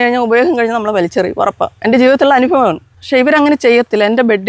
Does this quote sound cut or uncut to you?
uncut